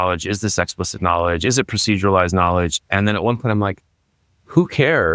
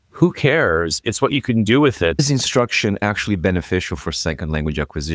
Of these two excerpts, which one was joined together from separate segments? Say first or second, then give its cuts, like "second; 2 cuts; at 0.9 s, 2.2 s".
second; 1 cut; at 2.2 s